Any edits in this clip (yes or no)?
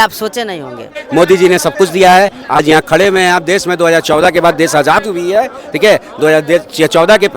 yes